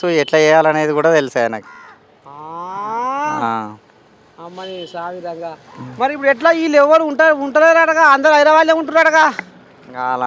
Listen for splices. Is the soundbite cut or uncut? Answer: cut